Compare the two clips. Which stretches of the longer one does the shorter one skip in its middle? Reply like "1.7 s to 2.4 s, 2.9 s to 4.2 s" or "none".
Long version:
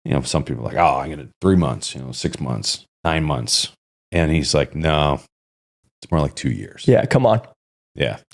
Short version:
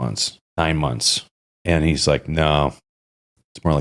none